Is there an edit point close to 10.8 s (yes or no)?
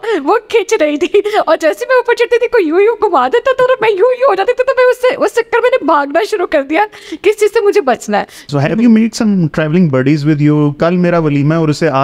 yes